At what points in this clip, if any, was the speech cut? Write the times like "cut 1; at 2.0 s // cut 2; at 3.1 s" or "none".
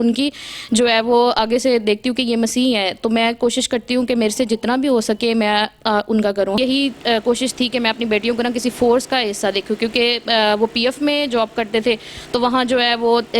cut 1; at 6.6 s